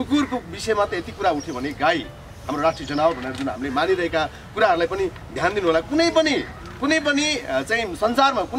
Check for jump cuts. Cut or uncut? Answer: uncut